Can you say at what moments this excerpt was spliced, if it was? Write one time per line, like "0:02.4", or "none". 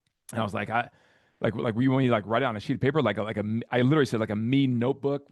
none